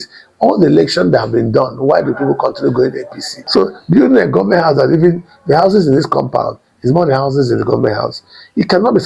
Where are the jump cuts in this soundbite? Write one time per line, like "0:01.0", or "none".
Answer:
0:03.4